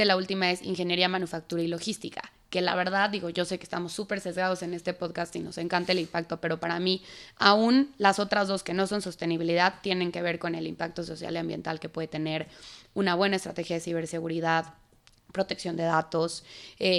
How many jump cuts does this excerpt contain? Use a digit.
0